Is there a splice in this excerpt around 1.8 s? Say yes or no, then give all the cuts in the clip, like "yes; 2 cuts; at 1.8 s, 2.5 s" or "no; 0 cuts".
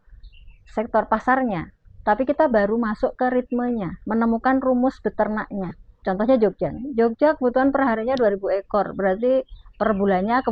no; 1 cut; at 6.0 s